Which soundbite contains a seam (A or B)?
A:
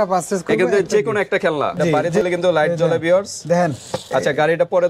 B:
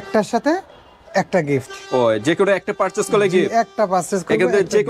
A